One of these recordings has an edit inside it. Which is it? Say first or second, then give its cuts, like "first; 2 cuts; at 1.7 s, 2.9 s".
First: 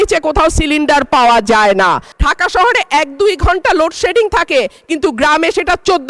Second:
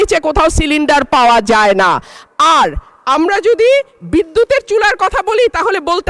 first; 1 cut; at 2.2 s